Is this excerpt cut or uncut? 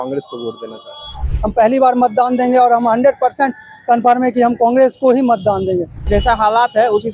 cut